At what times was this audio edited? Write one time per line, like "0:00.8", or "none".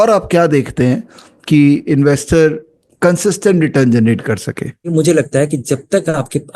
0:04.9